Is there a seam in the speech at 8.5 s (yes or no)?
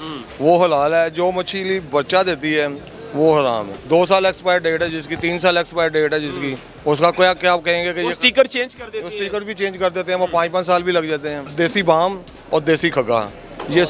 no